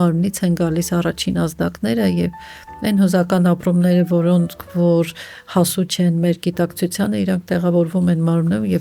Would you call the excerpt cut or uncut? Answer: uncut